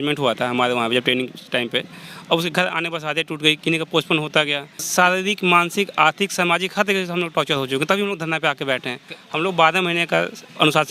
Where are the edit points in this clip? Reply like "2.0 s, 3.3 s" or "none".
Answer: 4.8 s